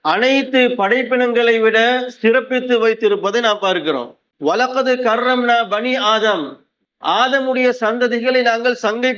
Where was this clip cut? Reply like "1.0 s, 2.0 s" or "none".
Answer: none